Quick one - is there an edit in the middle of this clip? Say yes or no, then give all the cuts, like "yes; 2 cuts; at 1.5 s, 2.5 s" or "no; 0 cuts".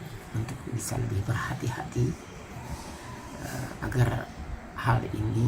no; 0 cuts